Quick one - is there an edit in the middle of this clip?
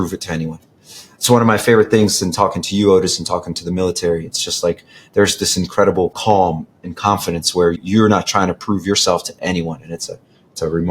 yes; 2 cuts; at 6.2 s, 7.8 s

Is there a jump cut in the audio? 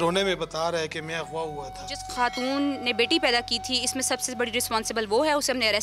yes; 1 cut; at 2.0 s

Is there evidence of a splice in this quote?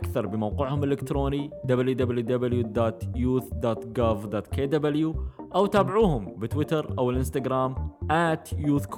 no; 0 cuts

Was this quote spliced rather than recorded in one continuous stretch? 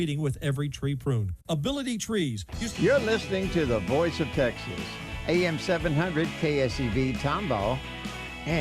yes; 1 cut; at 2.6 s

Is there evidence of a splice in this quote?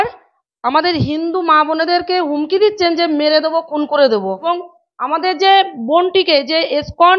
yes; 1 cut; at 4.4 s

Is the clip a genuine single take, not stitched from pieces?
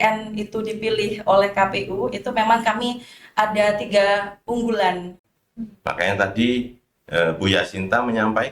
no; 1 cut; at 5.2 s

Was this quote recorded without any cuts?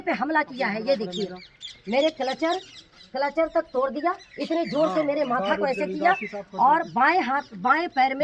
yes; 0 cuts

